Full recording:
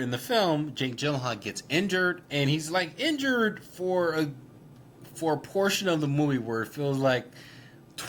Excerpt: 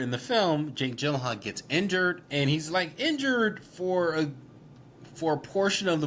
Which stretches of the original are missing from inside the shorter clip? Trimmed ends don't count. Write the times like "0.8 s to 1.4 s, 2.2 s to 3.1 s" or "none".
none